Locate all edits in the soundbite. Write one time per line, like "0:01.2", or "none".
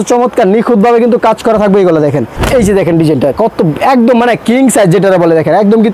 0:02.3